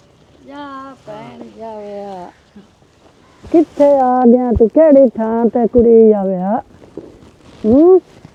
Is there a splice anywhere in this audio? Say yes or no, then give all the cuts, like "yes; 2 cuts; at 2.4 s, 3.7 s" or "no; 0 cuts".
no; 0 cuts